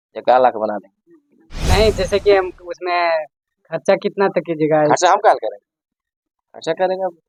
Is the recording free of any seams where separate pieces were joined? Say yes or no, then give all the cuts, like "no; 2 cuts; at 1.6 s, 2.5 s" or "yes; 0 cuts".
yes; 0 cuts